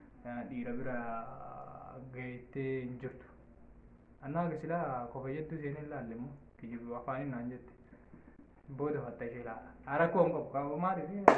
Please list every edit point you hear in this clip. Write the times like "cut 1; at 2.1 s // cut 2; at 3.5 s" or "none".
cut 1; at 6.7 s